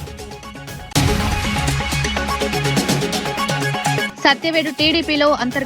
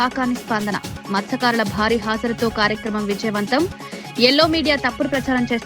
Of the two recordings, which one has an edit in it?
first; 3 cuts; at 0.9 s, 2.3 s, 3.6 s

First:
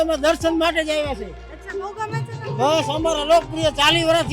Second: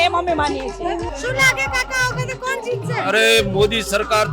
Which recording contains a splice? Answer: second; 1 cut; at 1.1 s

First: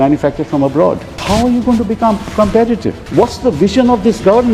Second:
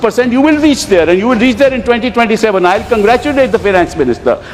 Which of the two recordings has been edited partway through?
first; 2 cuts; at 1.1 s, 3.0 s

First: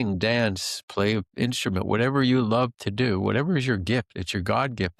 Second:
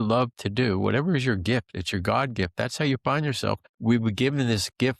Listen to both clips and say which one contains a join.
second; 1 cut; at 3.6 s

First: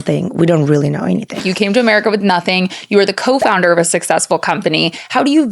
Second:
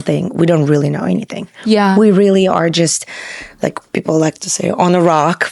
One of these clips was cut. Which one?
first; 1 cut; at 1.5 s

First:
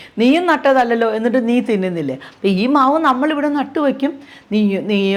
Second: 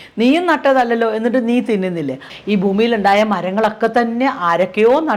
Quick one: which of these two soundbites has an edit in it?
second; 1 cut; at 2.3 s

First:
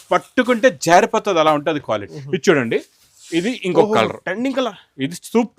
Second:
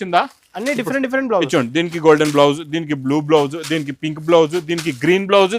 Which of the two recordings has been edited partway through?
first; 1 cut; at 2.1 s

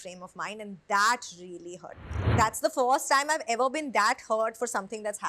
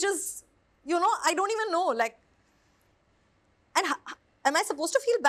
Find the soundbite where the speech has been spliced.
first; 1 cut; at 2.3 s

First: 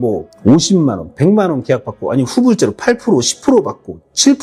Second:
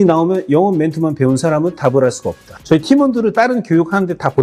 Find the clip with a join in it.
second; 1 cut; at 2.6 s

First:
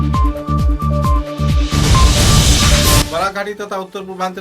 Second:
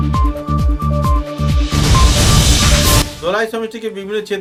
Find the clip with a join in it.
first; 1 cut; at 3.0 s

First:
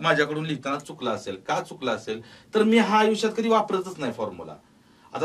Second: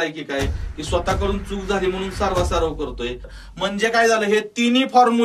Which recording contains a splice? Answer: second; 1 cut; at 3.3 s

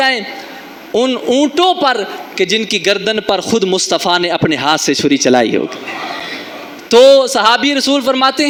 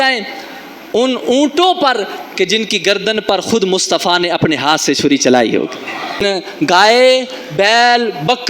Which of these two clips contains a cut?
second; 1 cut; at 6.2 s

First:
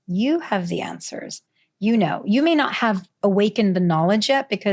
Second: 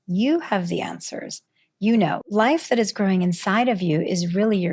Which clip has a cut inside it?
second; 1 cut; at 2.2 s

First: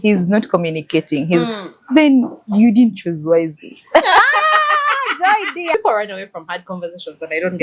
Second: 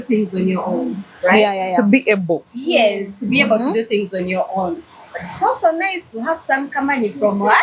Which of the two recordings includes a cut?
first; 1 cut; at 5.7 s

